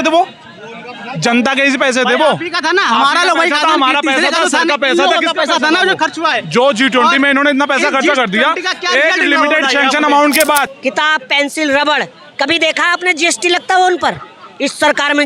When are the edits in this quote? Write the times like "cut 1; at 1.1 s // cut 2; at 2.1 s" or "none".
cut 1; at 10.7 s